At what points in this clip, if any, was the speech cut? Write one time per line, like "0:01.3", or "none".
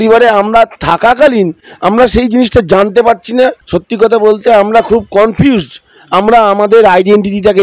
0:03.7

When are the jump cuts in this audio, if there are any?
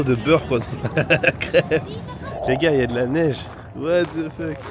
0:02.3

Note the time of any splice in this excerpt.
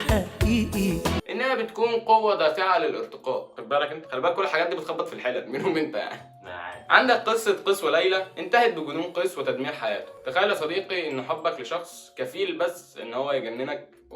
0:01.2
0:06.8

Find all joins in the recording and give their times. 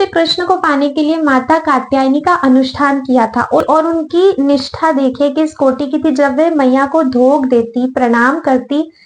0:03.6

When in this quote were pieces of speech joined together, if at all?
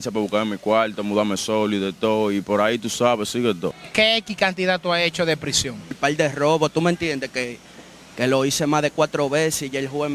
0:03.8
0:06.0

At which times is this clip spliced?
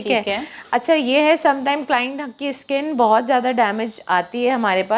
none

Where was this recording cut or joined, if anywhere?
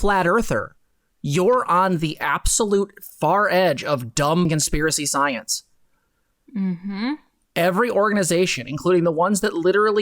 0:04.5

